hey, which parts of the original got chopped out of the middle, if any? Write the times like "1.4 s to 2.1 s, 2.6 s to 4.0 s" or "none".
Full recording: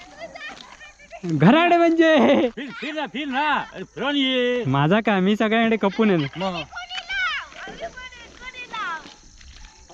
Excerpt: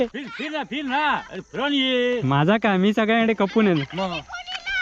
none